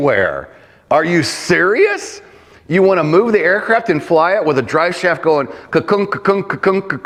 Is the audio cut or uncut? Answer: uncut